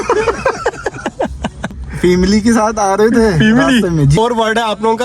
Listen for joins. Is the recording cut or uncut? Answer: cut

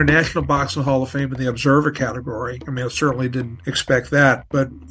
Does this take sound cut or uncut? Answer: uncut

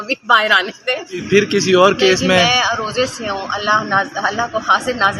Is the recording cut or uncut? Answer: cut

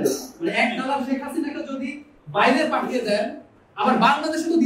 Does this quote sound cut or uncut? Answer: uncut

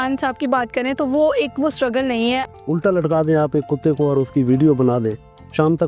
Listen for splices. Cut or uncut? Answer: cut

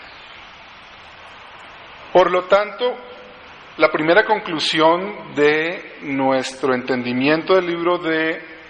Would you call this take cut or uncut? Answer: cut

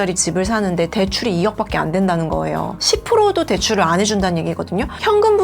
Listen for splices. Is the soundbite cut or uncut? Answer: cut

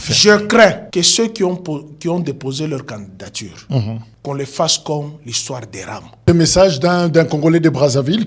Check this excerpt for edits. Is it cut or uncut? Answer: cut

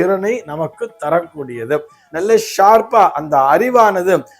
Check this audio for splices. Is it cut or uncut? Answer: cut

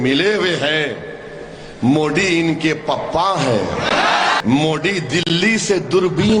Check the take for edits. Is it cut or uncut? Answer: cut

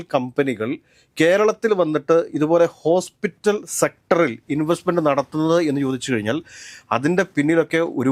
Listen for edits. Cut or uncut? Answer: uncut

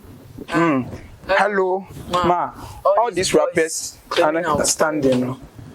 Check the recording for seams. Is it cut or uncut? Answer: uncut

